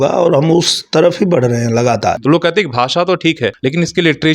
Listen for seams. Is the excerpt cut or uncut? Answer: cut